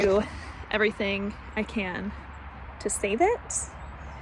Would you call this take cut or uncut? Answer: uncut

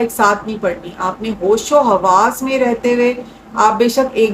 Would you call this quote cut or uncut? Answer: uncut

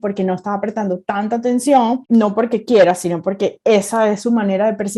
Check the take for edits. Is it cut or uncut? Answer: cut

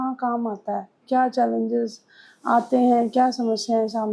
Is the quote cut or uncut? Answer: cut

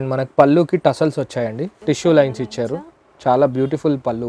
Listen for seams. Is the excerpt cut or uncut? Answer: cut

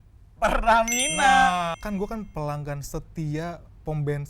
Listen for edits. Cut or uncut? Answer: cut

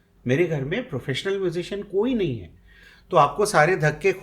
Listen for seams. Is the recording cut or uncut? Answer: uncut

